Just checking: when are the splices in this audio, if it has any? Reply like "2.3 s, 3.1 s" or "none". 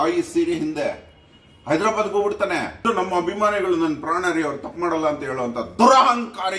2.9 s